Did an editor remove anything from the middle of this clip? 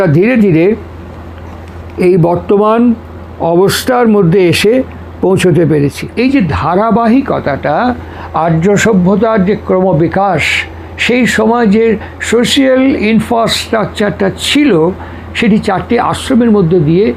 yes; 1 cut; at 6.0 s

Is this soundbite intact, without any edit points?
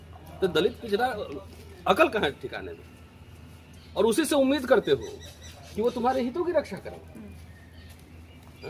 yes; 0 cuts

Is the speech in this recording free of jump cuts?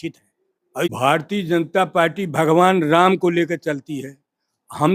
no; 1 cut; at 0.9 s

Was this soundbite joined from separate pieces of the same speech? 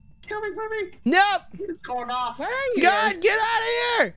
no; 0 cuts

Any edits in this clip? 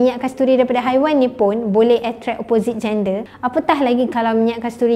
no; 0 cuts

